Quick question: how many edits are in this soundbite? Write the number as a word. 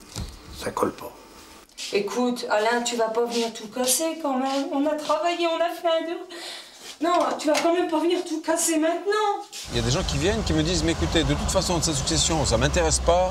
three